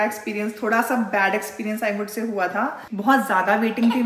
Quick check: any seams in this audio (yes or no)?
yes